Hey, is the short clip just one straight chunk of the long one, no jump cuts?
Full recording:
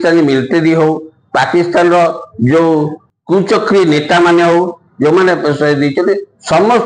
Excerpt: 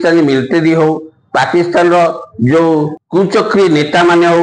no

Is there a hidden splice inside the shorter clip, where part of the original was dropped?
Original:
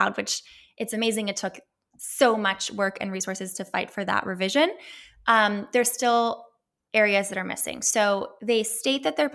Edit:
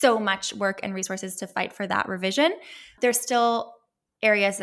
yes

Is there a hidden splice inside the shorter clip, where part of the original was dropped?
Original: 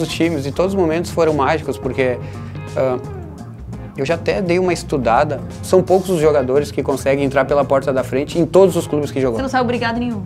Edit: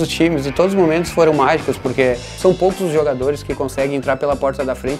yes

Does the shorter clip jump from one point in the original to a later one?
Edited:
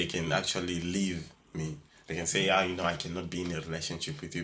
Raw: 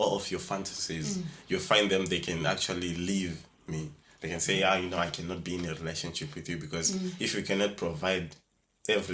no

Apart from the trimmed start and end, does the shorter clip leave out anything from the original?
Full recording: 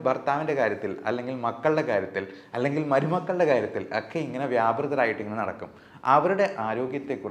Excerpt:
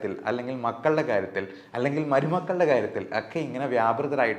no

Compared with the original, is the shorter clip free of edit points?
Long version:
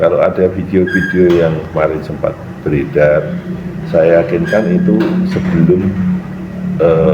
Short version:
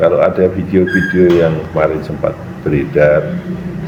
yes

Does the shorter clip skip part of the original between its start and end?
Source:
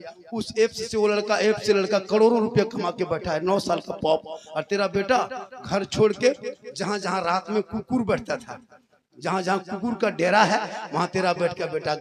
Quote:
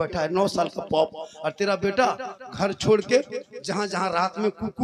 no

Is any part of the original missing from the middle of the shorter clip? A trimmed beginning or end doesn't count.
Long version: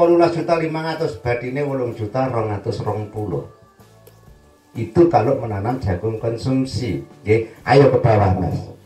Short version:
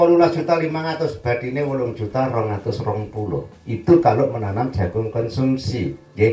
yes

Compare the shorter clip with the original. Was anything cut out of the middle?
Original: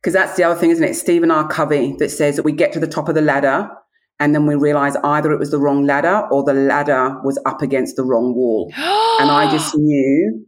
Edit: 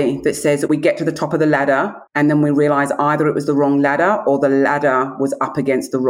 yes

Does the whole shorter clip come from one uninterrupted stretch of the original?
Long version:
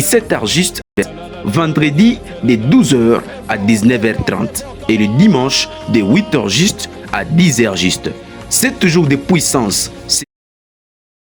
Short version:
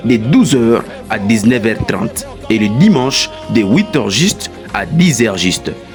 yes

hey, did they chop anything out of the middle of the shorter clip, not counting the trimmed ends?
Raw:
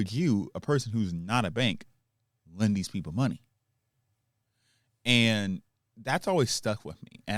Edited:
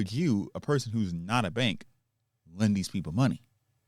no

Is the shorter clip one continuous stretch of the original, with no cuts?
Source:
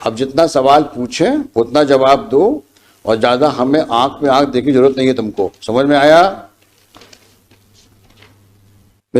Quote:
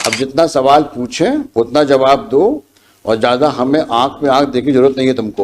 yes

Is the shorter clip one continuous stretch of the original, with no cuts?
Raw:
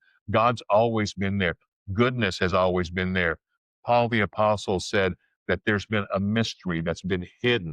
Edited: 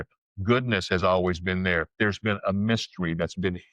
no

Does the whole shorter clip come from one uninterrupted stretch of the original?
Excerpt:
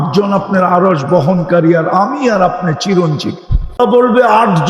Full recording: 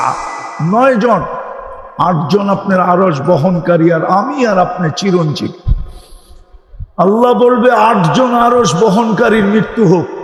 no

